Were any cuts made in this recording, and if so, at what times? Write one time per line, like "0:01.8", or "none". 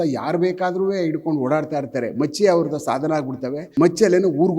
0:03.6